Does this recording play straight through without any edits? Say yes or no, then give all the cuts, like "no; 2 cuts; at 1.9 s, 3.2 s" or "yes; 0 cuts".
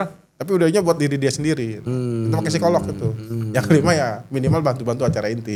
yes; 0 cuts